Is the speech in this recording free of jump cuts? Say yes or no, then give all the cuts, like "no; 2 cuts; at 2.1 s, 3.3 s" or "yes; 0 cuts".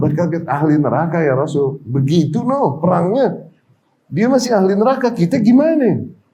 yes; 0 cuts